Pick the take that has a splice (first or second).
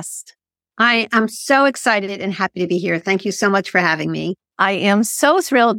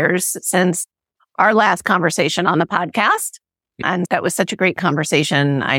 second